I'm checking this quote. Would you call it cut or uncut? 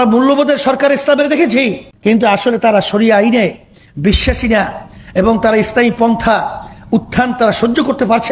cut